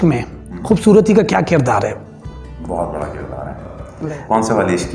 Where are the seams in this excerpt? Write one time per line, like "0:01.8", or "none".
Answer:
0:03.9